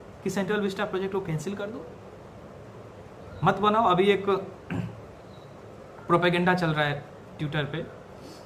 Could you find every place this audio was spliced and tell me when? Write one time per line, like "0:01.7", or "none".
none